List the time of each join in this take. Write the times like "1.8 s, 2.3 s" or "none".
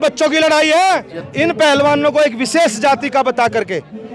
1.2 s